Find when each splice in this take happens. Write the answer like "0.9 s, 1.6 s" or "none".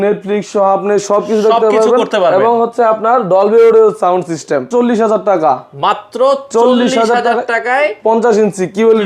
4.7 s